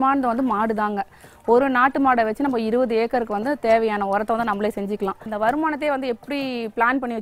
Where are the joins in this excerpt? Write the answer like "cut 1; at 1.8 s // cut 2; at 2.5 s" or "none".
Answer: cut 1; at 5.2 s